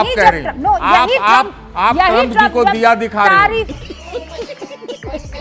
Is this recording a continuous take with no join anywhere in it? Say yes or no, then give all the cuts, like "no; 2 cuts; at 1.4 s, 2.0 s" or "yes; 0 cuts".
yes; 0 cuts